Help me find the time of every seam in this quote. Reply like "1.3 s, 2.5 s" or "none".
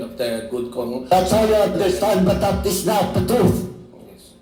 none